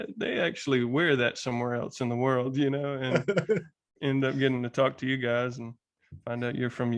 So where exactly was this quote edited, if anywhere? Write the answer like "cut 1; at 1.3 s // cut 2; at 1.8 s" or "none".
none